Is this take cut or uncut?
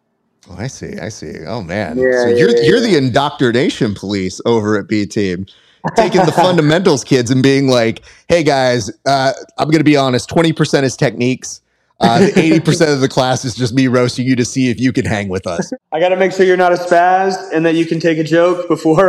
cut